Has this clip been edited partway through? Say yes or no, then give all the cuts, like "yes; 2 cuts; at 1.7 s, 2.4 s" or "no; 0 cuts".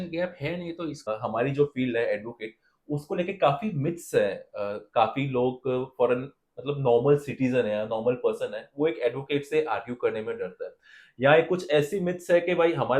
yes; 1 cut; at 1.1 s